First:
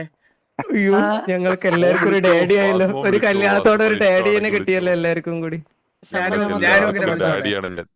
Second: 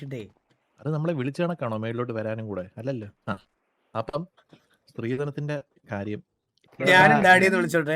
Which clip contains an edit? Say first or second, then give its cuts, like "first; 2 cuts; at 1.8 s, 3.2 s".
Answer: second; 1 cut; at 6.7 s